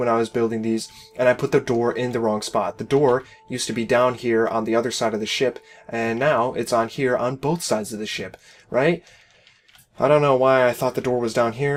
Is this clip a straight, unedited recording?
yes; 0 cuts

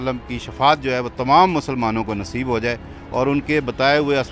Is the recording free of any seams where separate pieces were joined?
yes; 0 cuts

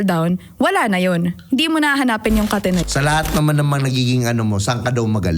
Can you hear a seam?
yes; 1 cut; at 2.8 s

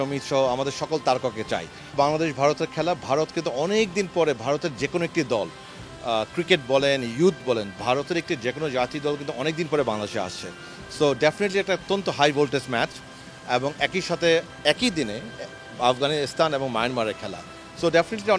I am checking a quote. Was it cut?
yes; 1 cut; at 1.9 s

